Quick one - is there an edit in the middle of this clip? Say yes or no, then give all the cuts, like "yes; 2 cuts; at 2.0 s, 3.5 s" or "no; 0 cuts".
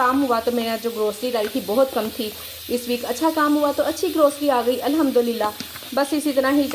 no; 0 cuts